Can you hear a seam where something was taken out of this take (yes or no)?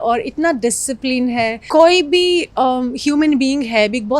yes